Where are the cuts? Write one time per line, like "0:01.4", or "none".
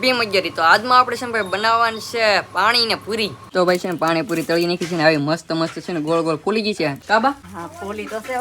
0:03.4
0:07.0
0:07.5